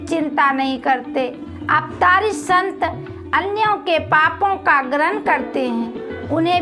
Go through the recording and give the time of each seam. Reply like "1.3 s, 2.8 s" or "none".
1.5 s